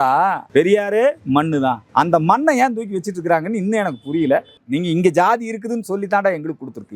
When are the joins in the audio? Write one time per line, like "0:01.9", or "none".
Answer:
0:01.8
0:04.6